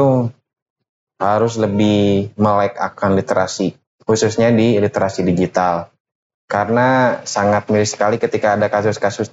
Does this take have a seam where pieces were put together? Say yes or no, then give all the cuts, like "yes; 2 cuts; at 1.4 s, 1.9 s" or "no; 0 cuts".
no; 0 cuts